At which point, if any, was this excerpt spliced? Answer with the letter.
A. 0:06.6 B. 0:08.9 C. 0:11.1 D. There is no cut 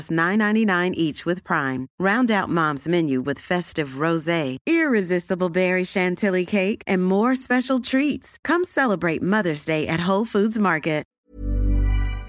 C